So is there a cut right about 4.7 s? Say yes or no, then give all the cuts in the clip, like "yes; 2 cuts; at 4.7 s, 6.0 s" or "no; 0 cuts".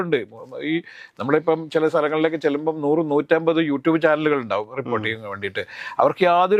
no; 0 cuts